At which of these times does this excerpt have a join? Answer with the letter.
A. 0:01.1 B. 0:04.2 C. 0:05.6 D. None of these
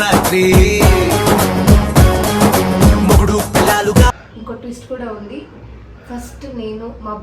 B